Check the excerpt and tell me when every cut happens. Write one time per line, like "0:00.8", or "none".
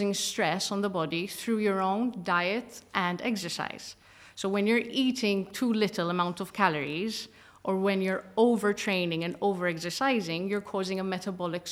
none